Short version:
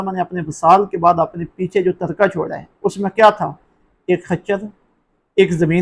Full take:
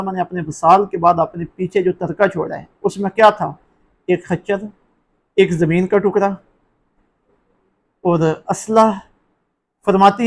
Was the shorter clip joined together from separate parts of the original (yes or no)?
no